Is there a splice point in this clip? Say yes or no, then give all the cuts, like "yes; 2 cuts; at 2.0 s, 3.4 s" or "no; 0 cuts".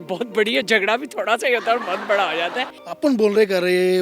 yes; 1 cut; at 2.8 s